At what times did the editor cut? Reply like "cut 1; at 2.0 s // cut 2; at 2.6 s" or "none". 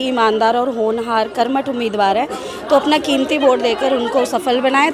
none

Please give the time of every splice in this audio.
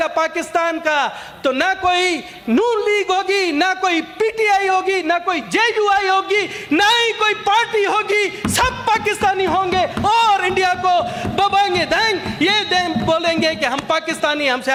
none

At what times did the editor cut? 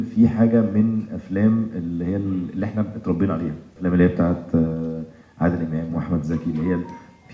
cut 1; at 3.7 s

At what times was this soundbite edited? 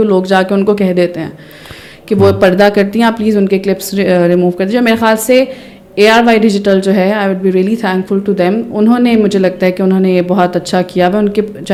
none

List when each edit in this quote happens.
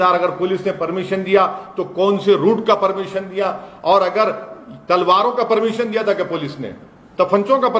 none

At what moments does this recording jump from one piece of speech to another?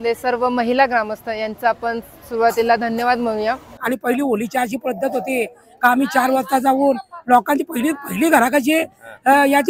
cut 1; at 3.7 s

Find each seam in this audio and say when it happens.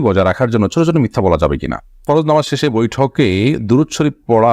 cut 1; at 2.0 s

